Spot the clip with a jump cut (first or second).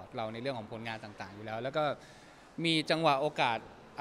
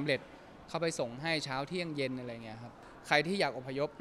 second